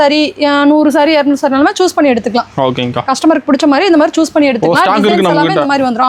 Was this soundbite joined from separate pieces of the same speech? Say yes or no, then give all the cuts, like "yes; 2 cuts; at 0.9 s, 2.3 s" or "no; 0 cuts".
no; 0 cuts